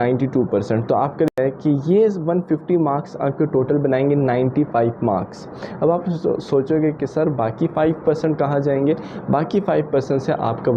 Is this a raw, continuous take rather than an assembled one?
no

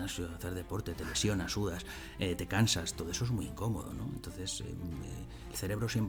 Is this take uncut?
yes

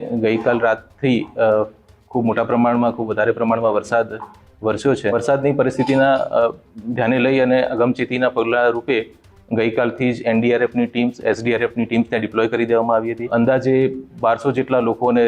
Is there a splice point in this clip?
yes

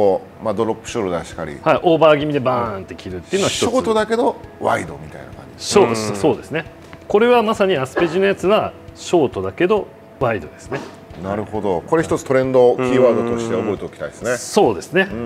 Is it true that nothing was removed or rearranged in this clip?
yes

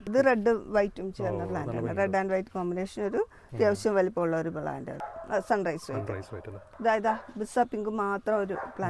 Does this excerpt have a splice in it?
yes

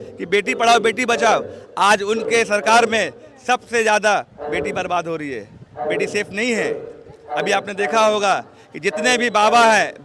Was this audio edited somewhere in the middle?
no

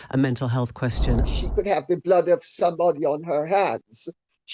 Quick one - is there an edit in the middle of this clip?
yes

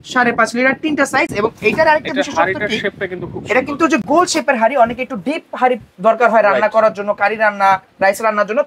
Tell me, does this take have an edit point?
no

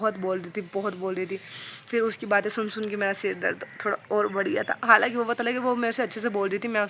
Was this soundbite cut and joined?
no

